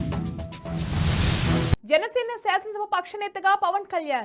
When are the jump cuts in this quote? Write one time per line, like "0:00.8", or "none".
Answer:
0:01.6